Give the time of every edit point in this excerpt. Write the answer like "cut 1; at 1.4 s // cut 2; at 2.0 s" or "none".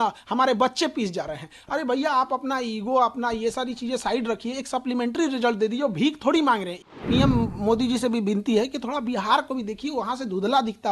cut 1; at 6.9 s